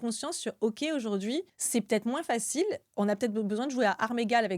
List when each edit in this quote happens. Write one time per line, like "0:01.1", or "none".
0:01.6